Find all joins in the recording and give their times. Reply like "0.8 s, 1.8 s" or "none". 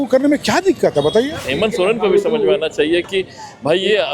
1.5 s